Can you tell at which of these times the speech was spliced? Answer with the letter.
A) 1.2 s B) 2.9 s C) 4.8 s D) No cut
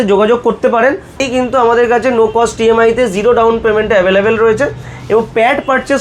A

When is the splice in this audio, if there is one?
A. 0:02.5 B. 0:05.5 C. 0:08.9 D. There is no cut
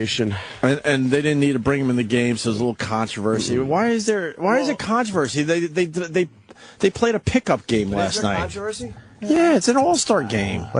A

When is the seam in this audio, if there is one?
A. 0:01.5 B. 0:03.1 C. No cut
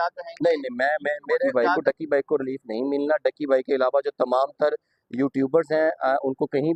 A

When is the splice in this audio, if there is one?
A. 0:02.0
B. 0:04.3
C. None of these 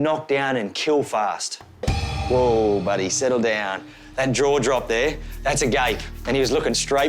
A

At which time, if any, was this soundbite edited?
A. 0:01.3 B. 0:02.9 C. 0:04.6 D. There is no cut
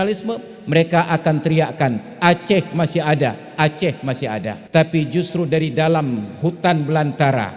C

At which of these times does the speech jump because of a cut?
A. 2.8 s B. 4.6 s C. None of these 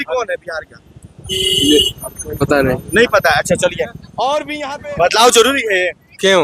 B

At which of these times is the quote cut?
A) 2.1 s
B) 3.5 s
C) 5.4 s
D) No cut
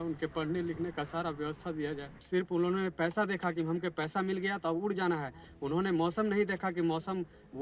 A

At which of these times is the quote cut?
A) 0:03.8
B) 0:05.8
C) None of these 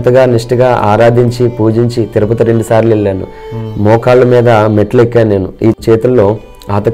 B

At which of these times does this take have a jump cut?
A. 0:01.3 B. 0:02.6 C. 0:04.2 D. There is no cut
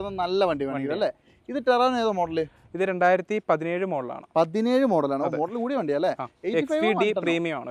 D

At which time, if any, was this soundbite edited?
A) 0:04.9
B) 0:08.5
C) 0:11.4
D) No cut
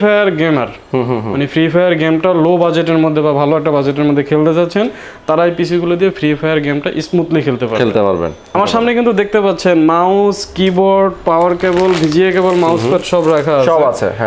B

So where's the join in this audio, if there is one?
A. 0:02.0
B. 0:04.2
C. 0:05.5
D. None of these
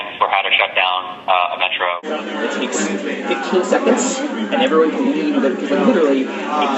A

